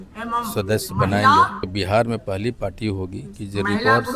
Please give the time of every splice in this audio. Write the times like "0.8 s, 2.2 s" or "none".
1.7 s